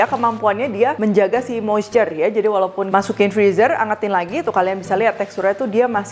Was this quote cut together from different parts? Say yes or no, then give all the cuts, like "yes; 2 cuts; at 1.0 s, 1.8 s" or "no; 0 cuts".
yes; 2 cuts; at 1.0 s, 2.8 s